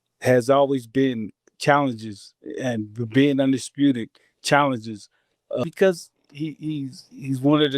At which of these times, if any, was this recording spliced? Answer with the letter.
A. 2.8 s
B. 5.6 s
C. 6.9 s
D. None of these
B